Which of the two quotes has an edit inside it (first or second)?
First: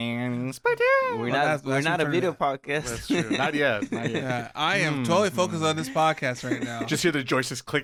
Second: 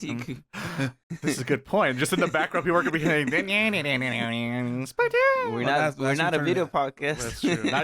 second